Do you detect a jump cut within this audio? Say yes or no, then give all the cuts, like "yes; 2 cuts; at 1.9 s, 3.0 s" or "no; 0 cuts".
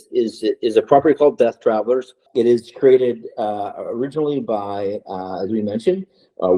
yes; 1 cut; at 2.2 s